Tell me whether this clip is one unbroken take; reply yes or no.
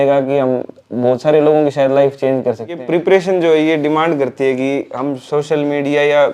no